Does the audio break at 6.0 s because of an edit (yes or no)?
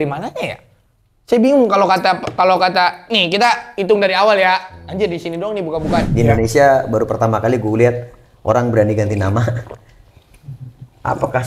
yes